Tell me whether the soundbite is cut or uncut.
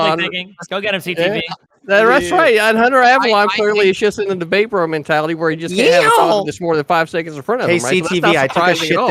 uncut